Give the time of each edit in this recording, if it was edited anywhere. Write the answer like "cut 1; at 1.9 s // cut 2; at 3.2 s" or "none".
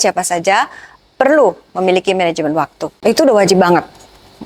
cut 1; at 2.8 s